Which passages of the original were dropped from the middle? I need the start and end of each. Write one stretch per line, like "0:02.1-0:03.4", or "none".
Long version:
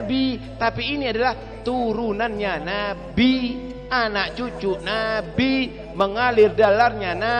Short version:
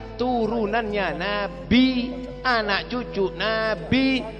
none